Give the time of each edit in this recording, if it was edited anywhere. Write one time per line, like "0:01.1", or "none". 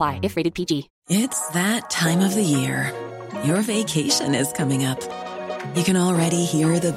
0:00.9